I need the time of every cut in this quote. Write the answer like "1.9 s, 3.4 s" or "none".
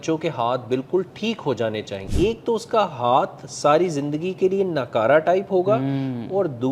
2.0 s